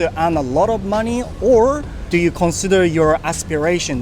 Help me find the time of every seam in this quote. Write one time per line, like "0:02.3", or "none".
0:01.9